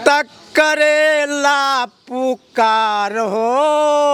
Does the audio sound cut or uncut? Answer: uncut